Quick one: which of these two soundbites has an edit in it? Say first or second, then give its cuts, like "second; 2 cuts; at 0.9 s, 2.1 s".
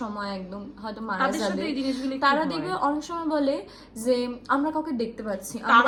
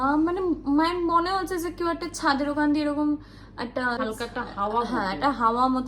second; 1 cut; at 4.0 s